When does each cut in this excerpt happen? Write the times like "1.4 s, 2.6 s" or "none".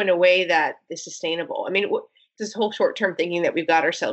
2.3 s